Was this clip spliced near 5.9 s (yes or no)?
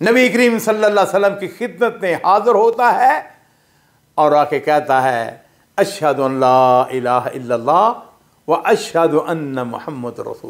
no